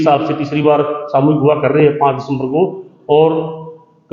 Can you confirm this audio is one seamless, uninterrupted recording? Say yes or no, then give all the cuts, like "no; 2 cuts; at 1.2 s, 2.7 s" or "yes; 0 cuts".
yes; 0 cuts